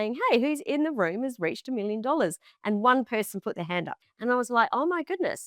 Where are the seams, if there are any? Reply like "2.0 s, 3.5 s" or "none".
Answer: 4.0 s